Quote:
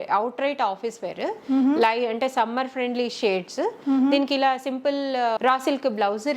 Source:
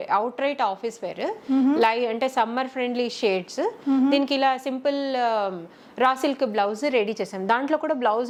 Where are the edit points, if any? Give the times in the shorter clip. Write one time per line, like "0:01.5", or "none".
0:05.4